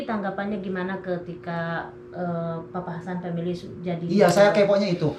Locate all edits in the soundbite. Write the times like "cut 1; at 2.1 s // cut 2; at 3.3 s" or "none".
none